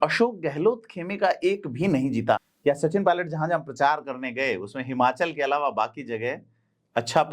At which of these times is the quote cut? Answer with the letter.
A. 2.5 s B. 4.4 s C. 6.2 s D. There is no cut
A